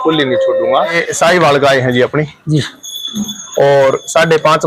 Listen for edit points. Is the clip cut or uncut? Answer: cut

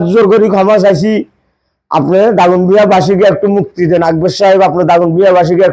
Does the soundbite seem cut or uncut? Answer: uncut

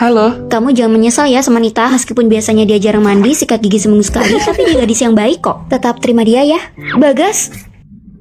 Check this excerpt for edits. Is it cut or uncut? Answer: uncut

